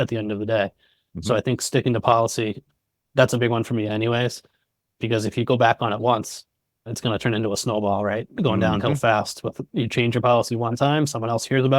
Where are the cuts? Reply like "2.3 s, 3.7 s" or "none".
2.7 s, 6.9 s